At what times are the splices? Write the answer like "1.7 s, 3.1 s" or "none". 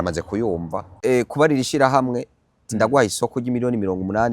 0.9 s